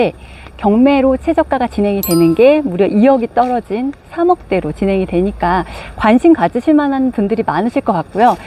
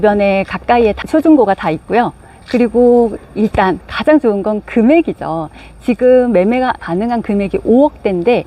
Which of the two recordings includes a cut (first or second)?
second